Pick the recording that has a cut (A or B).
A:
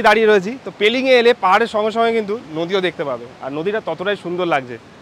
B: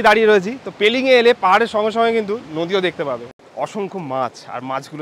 B